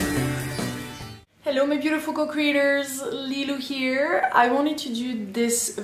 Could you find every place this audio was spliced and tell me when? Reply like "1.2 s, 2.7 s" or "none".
none